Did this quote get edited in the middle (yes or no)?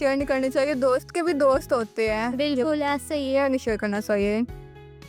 no